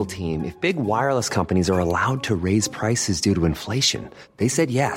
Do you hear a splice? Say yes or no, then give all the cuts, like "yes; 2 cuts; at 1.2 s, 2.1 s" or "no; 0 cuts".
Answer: no; 0 cuts